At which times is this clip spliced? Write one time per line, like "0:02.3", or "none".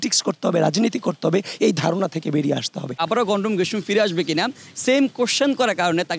0:03.0